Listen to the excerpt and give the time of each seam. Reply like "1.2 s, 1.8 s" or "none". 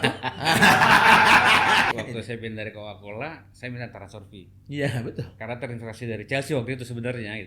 1.9 s